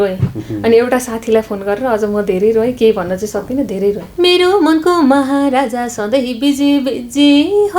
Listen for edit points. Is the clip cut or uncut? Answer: cut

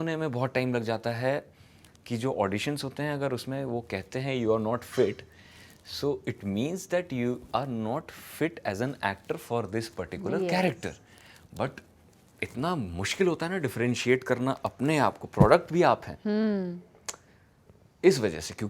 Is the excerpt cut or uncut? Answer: uncut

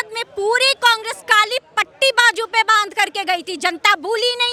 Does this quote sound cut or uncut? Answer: uncut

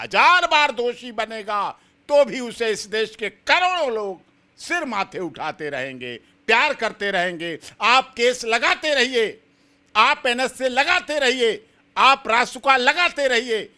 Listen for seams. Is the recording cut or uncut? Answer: uncut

